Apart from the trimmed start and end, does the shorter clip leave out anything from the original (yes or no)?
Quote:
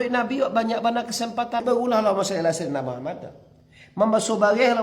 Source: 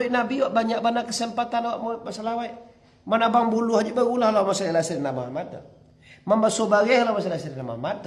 yes